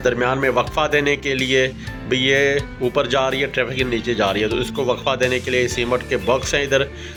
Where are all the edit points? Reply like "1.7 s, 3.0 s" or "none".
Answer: none